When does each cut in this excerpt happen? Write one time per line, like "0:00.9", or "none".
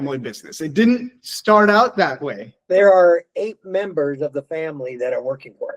0:02.5